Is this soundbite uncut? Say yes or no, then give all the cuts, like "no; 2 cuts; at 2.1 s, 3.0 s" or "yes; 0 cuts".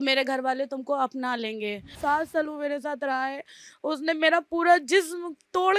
no; 1 cut; at 1.9 s